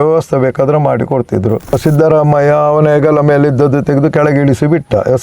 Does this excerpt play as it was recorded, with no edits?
no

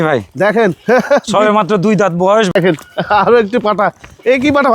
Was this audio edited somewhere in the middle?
yes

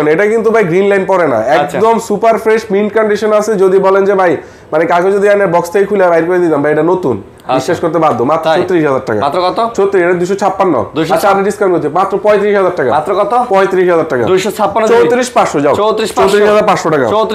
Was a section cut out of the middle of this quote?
no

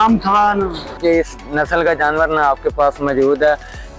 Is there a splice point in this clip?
yes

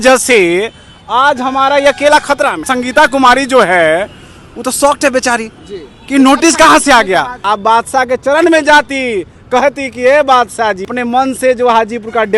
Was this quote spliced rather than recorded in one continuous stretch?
yes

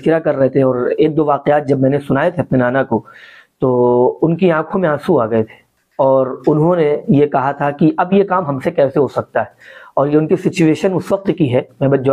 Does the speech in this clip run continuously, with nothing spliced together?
yes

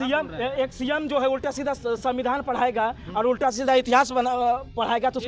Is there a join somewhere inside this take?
no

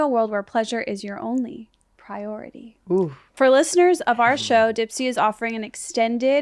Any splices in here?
yes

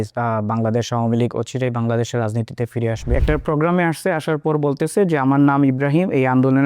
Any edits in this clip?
yes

